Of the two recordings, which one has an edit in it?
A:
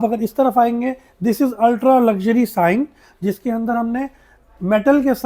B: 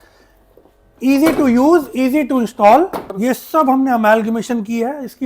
B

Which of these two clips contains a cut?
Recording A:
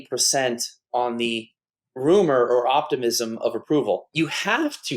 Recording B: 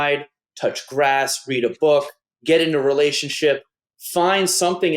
A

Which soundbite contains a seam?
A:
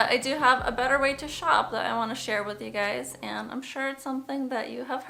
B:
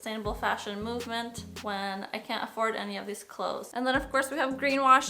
B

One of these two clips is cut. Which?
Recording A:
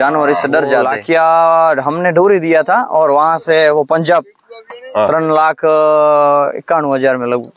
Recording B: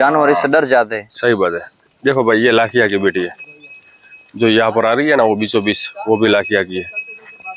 A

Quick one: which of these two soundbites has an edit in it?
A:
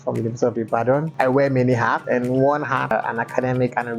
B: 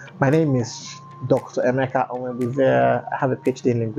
A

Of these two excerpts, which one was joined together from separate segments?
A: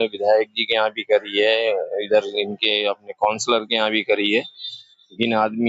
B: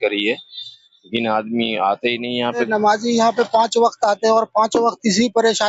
B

